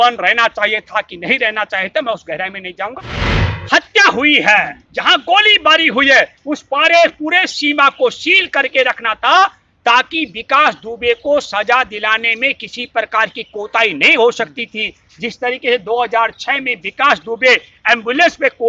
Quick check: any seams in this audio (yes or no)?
yes